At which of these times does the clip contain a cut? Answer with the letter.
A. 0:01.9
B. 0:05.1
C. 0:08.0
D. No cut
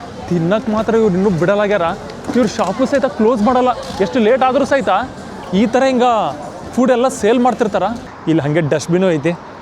C